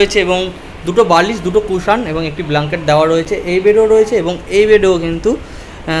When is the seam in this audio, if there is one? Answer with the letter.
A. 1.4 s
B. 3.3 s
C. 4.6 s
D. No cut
D